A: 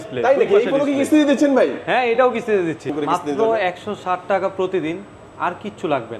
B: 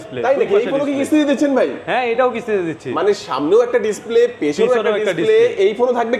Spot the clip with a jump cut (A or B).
A